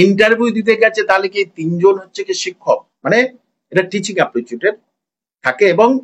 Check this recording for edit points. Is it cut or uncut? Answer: cut